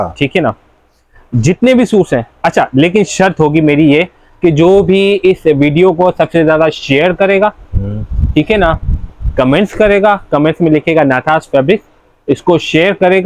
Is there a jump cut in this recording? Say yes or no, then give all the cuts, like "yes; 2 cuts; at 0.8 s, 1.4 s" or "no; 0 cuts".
no; 0 cuts